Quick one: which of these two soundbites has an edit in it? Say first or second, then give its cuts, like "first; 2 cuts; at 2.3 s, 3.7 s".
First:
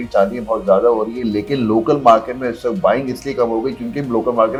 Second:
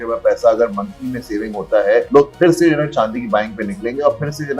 second; 1 cut; at 2.1 s